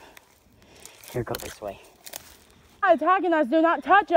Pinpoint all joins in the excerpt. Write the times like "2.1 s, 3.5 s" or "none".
2.8 s